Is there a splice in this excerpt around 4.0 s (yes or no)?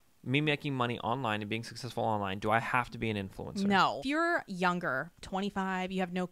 yes